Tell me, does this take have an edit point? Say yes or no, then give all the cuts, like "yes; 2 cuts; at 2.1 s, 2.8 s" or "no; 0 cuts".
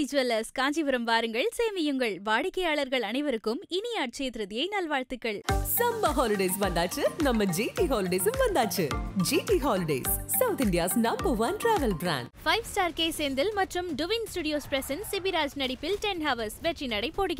no; 0 cuts